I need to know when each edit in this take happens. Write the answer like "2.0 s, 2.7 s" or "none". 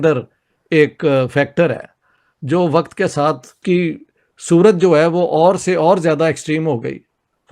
none